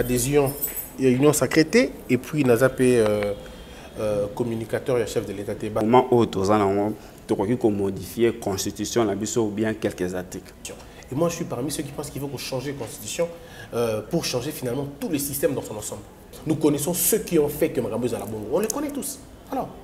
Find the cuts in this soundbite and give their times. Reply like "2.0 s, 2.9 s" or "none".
5.8 s, 10.5 s, 16.3 s